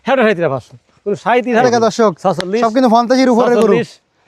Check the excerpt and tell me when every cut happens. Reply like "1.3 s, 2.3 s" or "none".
1.5 s